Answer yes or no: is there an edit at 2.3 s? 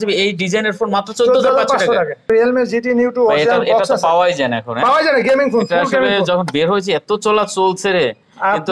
yes